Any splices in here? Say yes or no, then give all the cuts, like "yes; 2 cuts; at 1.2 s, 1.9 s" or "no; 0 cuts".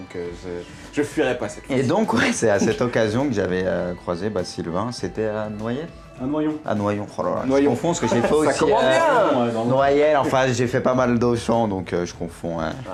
no; 0 cuts